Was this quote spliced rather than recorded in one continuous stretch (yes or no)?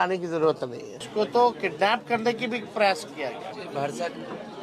yes